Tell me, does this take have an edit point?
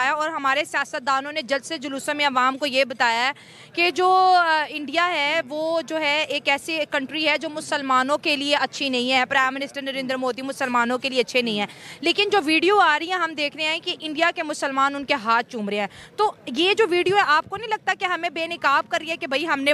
no; 0 cuts

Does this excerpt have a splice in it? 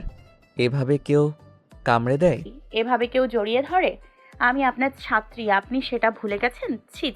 yes; 1 cut; at 2.5 s

